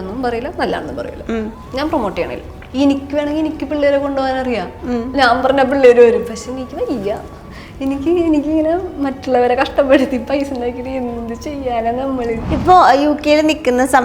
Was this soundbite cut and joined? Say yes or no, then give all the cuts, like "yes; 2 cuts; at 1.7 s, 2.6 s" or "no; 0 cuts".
yes; 3 cuts; at 1.6 s, 2.6 s, 12.4 s